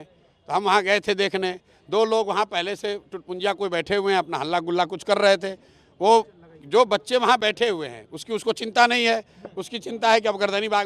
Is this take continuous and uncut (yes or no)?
yes